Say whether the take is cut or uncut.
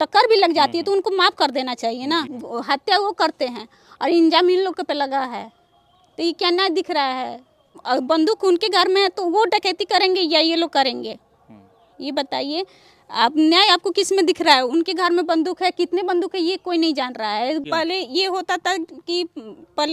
cut